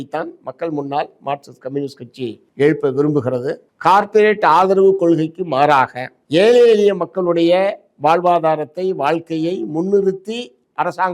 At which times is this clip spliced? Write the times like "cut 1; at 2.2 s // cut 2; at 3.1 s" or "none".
none